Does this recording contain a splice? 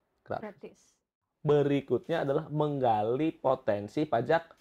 yes; 1 cut; at 1.2 s

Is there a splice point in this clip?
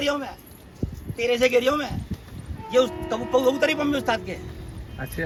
no; 0 cuts

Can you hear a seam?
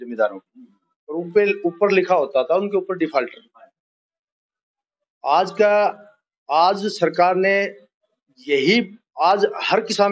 no; 0 cuts

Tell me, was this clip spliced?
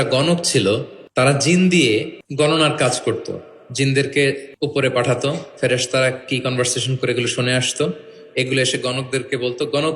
yes; 3 cuts; at 1.0 s, 2.2 s, 4.5 s

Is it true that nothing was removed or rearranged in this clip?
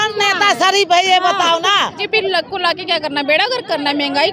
no; 1 cut; at 2.0 s

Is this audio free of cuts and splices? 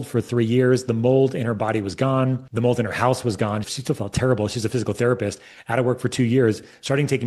no; 1 cut; at 2.5 s

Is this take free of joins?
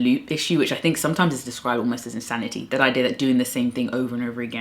yes; 0 cuts

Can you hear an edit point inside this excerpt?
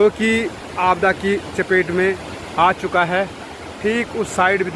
no; 0 cuts

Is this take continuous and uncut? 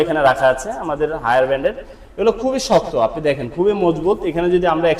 yes; 0 cuts

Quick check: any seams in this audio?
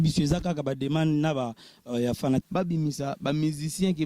yes; 1 cut; at 2.4 s

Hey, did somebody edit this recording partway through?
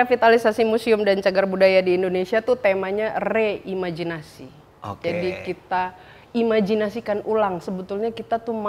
no; 0 cuts

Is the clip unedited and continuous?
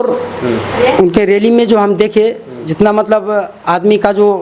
yes; 0 cuts

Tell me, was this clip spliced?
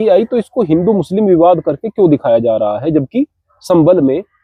no; 0 cuts

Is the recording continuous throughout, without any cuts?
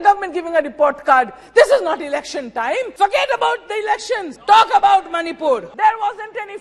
no; 3 cuts; at 2.9 s, 4.3 s, 5.7 s

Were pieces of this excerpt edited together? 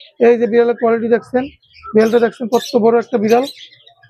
no; 0 cuts

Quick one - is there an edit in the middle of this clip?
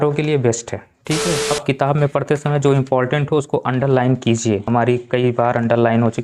yes; 2 cuts; at 1.5 s, 4.6 s

